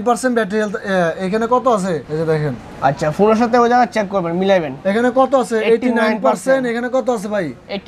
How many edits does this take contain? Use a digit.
0